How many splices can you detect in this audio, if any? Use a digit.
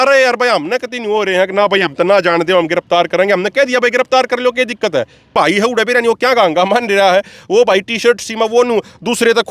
1